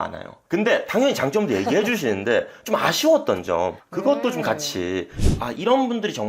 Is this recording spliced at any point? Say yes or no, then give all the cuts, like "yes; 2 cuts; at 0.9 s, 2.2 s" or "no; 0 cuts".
yes; 1 cut; at 5.3 s